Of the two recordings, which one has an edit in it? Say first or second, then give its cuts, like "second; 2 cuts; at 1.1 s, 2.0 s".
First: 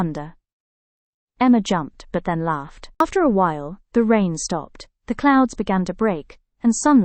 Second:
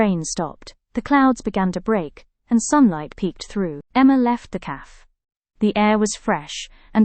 first; 1 cut; at 3.0 s